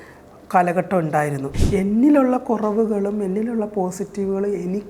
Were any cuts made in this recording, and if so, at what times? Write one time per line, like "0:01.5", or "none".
0:01.5